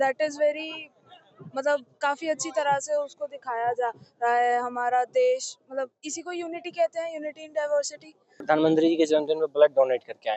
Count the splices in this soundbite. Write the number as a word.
one